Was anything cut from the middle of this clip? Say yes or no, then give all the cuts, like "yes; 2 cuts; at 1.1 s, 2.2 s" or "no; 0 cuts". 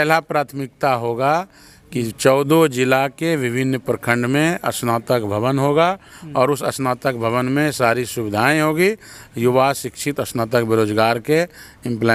no; 0 cuts